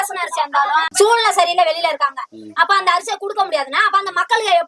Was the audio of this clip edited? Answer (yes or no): yes